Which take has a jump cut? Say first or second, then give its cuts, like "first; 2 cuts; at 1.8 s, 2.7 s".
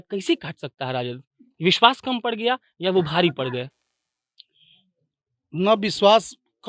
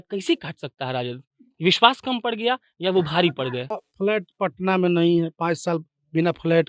second; 1 cut; at 3.7 s